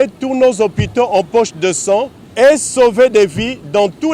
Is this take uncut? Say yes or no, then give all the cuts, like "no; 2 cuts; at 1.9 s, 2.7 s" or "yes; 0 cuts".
no; 1 cut; at 2.2 s